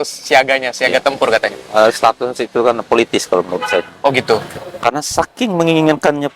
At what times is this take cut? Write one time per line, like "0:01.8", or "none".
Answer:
0:04.5

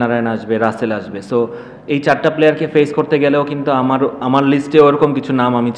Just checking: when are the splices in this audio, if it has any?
none

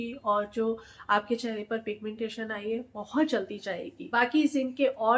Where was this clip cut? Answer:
none

